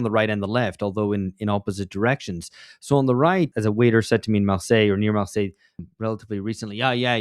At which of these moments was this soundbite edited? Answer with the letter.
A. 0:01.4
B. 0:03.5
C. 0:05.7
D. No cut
B